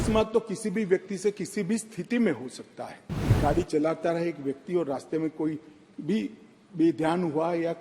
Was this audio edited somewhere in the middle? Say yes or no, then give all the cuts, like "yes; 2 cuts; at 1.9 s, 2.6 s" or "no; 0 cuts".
yes; 1 cut; at 3.4 s